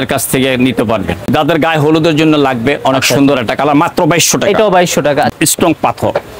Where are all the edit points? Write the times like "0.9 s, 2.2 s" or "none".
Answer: 1.3 s, 5.3 s